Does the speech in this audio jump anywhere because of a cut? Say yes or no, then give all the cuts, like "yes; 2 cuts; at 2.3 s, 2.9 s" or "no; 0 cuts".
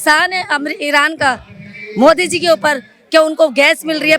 no; 0 cuts